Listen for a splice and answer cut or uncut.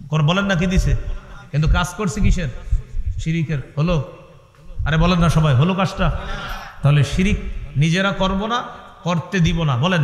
uncut